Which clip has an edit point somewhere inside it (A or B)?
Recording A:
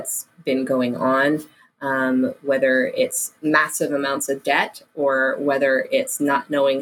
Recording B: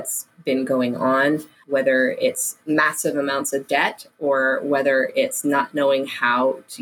B